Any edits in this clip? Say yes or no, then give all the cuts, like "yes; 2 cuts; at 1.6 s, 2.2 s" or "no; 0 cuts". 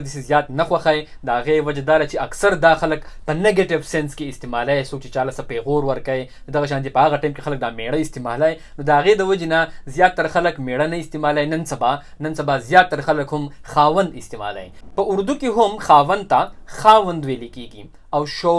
no; 0 cuts